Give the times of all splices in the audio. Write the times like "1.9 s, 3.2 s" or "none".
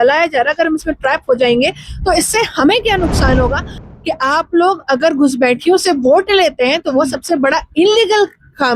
3.8 s

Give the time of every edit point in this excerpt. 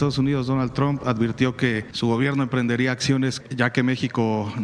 1.9 s, 3.4 s

